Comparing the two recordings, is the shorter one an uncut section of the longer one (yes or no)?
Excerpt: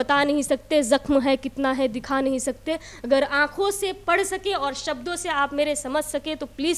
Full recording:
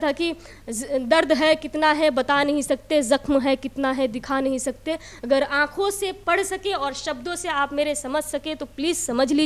yes